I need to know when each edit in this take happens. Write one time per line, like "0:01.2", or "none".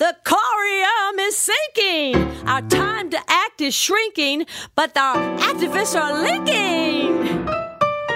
none